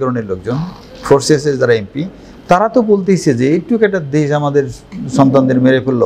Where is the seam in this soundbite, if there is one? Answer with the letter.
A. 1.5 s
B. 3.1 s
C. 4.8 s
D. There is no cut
D